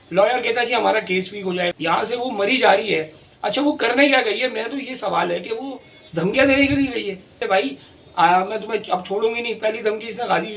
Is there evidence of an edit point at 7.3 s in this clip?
yes; 2 cuts; at 1.7 s, 7.3 s

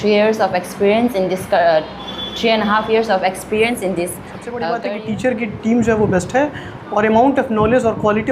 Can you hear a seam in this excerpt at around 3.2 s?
no; 1 cut; at 4.6 s

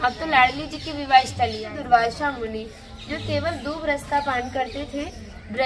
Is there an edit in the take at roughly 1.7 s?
yes; 1 cut; at 1.7 s

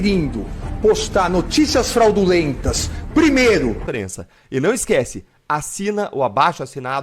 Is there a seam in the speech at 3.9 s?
yes; 1 cut; at 3.9 s

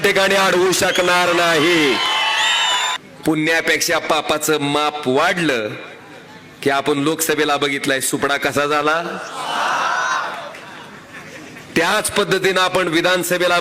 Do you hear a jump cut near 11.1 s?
no; 1 cut; at 3.1 s

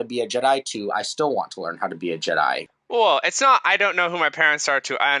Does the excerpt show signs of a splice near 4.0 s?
no; 1 cut; at 2.7 s

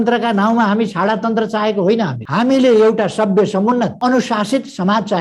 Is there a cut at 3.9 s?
yes; 1 cut; at 3.9 s

